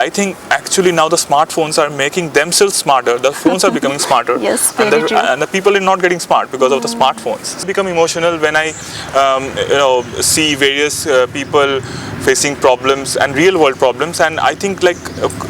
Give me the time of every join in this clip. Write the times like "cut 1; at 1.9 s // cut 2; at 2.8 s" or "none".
cut 1; at 7.6 s